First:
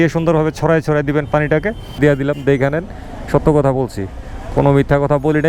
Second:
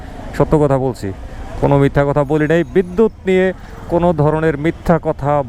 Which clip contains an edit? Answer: first; 1 cut; at 2.0 s

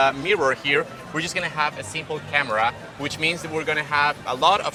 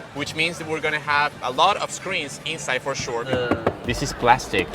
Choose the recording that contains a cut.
second; 1 cut; at 3.3 s

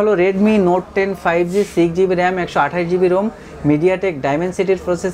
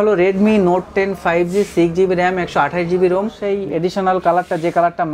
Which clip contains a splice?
second; 1 cut; at 3.4 s

